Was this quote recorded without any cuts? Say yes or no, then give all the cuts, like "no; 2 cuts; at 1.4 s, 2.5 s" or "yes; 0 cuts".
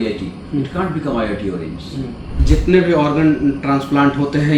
no; 1 cut; at 2.3 s